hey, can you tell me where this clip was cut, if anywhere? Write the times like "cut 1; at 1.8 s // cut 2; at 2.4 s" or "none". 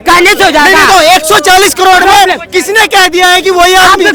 none